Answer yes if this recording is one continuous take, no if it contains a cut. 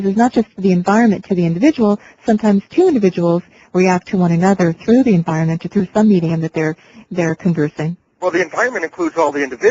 yes